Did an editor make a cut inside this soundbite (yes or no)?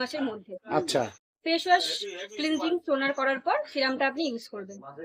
no